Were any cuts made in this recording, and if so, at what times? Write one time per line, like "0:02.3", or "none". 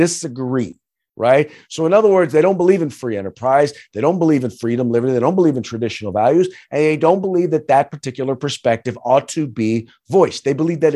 none